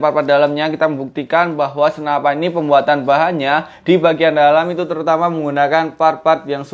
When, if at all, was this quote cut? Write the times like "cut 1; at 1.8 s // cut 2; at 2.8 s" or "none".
none